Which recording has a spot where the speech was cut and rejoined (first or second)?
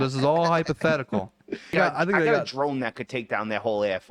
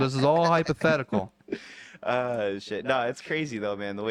first